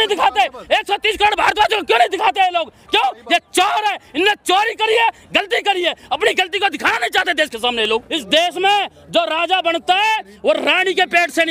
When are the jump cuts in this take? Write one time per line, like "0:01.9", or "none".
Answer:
0:08.1